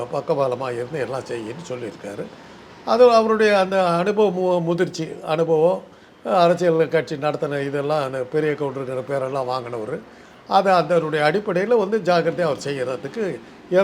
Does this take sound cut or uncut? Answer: uncut